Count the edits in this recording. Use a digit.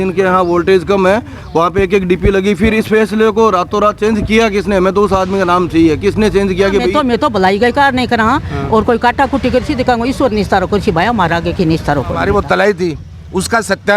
2